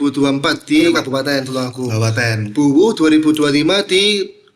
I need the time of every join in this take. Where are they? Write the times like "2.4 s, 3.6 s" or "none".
none

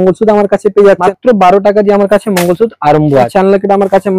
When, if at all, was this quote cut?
1.1 s, 3.3 s

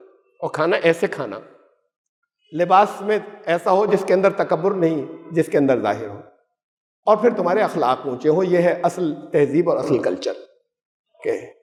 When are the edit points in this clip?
none

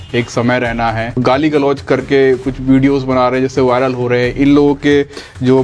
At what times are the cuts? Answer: 1.2 s

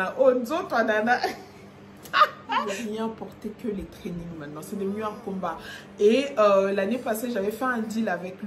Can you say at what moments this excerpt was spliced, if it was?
2.8 s

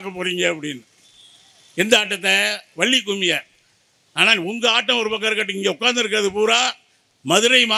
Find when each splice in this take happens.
none

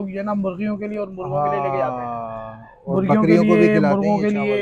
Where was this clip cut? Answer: none

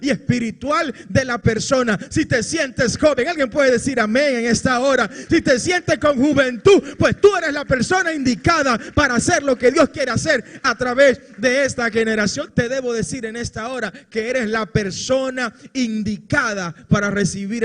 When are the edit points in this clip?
12.5 s

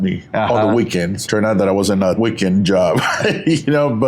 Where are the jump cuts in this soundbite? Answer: 1.2 s, 2.2 s

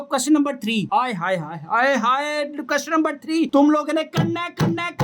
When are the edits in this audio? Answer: none

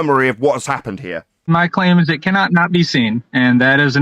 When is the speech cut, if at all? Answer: 1.5 s

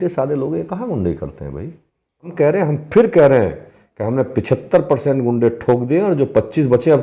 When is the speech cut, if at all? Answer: 2.3 s

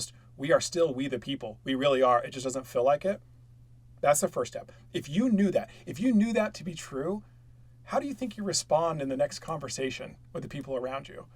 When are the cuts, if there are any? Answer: none

